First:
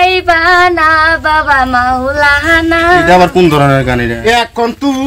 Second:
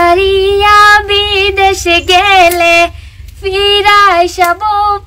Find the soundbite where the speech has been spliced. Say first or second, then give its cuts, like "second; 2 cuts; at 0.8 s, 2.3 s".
first; 1 cut; at 4.1 s